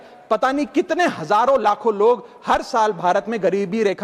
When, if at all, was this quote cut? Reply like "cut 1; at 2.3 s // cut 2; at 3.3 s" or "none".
none